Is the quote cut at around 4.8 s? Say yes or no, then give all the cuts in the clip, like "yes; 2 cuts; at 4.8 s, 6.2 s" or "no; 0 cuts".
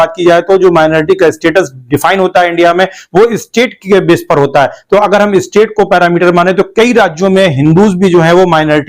no; 0 cuts